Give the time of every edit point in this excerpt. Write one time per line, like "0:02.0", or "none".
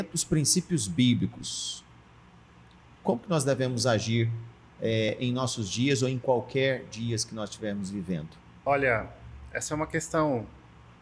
0:08.4